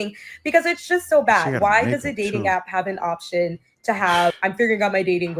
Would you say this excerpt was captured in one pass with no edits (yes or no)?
yes